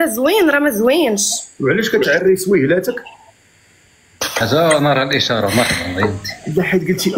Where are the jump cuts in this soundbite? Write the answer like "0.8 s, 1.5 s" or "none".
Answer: 4.3 s